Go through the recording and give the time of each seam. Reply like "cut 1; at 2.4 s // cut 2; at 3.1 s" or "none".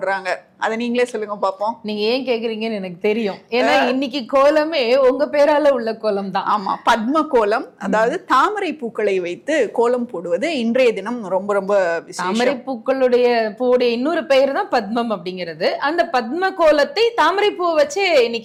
none